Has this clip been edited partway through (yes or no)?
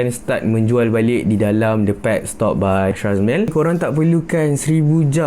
yes